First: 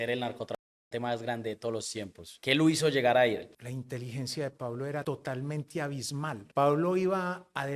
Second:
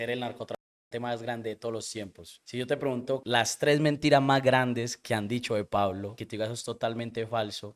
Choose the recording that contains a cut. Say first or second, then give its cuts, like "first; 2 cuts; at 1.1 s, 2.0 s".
second; 1 cut; at 2.4 s